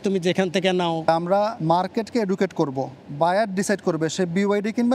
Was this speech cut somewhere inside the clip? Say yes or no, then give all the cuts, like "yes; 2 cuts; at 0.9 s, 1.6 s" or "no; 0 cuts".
yes; 2 cuts; at 1.2 s, 3.0 s